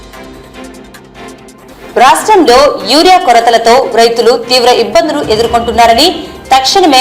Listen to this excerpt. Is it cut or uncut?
cut